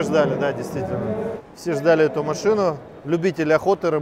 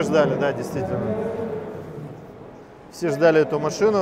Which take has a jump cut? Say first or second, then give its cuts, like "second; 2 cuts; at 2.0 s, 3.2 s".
first; 1 cut; at 1.4 s